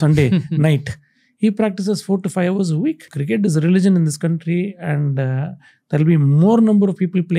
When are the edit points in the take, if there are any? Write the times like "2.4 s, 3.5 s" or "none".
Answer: 3.1 s